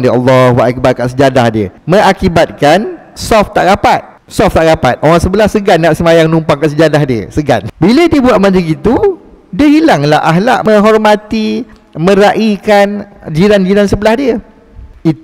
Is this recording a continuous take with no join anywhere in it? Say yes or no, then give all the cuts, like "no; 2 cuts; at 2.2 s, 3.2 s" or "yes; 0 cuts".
no; 2 cuts; at 7.7 s, 10.6 s